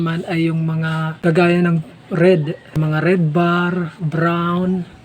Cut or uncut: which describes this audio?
cut